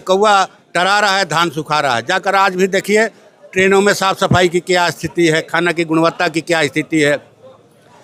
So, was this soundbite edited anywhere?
no; 0 cuts

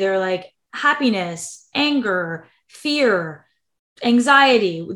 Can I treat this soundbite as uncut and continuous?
yes; 0 cuts

